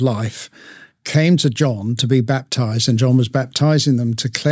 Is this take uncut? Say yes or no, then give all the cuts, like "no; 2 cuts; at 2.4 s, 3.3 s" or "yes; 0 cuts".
yes; 0 cuts